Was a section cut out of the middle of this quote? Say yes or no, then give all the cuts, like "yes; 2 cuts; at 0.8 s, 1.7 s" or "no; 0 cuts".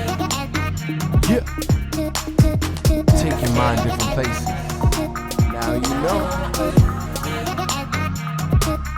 no; 0 cuts